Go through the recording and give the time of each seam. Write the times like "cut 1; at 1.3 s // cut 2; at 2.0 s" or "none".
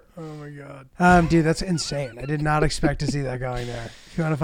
cut 1; at 0.9 s